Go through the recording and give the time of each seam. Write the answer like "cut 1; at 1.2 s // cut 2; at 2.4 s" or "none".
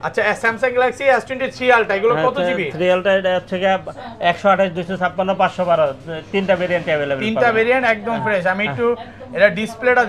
none